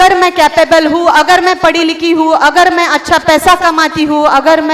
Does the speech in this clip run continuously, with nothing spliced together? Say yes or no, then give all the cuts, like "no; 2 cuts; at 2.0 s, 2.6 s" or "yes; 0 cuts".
yes; 0 cuts